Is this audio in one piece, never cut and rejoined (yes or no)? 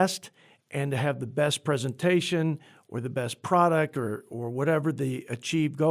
yes